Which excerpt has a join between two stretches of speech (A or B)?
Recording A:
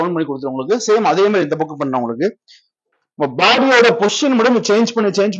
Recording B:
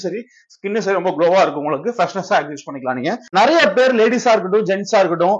B